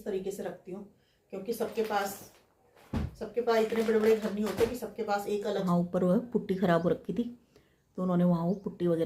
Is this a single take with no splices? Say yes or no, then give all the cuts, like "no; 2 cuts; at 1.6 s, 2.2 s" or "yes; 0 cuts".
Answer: no; 1 cut; at 5.6 s